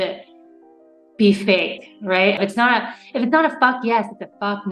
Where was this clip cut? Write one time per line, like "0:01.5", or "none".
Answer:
0:02.4

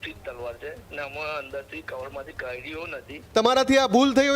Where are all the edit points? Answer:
0:03.2

